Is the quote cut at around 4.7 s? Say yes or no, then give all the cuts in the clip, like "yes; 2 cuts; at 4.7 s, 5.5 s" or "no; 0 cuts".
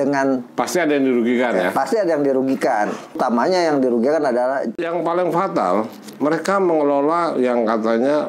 yes; 2 cuts; at 3.2 s, 4.7 s